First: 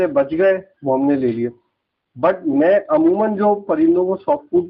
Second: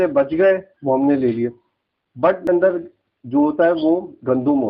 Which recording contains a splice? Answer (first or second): second